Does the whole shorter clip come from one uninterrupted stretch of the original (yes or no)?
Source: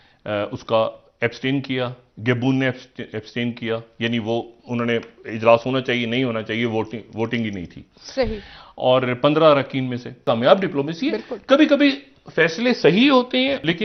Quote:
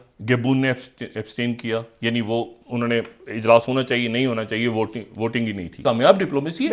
no